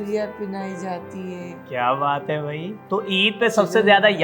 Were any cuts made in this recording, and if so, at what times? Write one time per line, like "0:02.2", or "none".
0:02.7